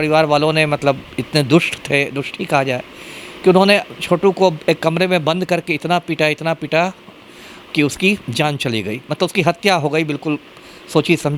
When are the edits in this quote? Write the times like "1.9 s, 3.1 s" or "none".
none